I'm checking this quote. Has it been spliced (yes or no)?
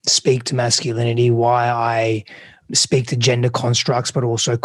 yes